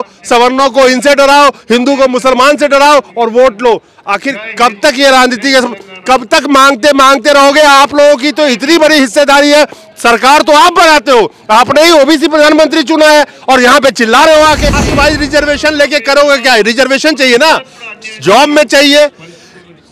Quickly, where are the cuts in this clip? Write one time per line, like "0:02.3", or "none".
0:14.8